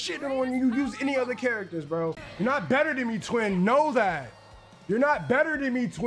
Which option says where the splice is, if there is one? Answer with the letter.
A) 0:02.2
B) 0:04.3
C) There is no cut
A